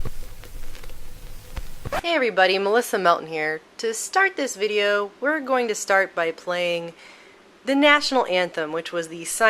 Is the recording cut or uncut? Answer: cut